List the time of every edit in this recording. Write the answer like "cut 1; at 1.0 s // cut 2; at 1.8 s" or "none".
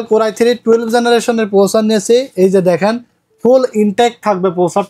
none